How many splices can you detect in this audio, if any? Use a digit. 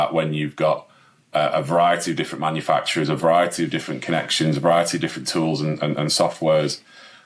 0